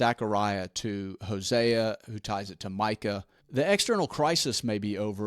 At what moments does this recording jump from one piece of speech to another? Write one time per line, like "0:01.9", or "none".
0:03.5